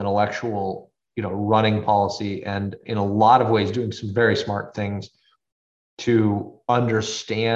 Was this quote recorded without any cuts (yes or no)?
no